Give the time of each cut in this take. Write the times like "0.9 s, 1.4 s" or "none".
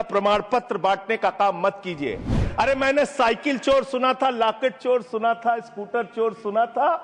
2.4 s